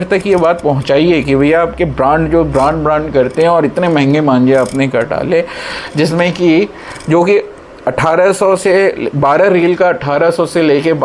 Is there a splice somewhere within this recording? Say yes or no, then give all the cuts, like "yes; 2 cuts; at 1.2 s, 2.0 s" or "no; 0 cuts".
no; 0 cuts